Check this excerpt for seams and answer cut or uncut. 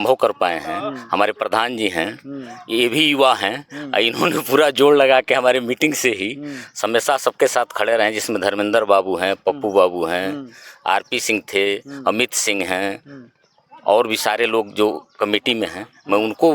uncut